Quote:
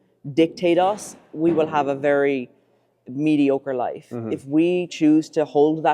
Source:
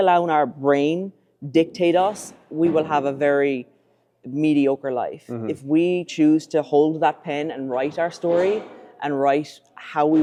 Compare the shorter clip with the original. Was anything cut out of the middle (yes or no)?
no